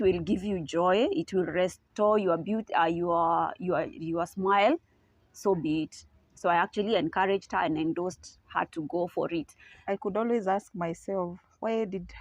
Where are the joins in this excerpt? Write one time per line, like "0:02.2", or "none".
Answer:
0:09.7

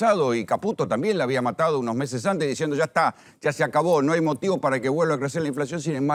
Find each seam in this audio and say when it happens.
none

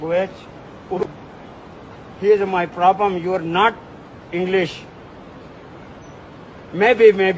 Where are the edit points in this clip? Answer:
0:01.0

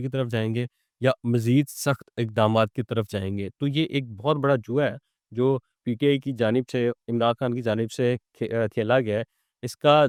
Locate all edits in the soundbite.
none

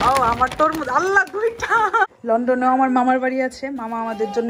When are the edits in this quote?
0:02.1

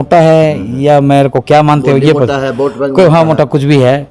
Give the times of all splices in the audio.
none

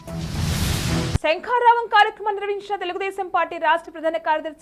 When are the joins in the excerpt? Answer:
none

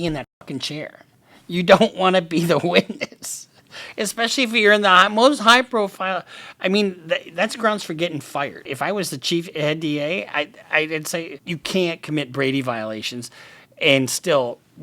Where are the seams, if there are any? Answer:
0:08.7
0:11.4

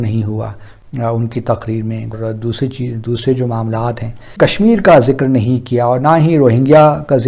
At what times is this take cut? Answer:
0:02.1
0:04.3

